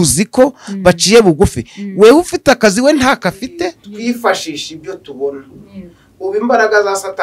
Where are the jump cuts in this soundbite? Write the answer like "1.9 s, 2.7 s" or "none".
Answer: 3.8 s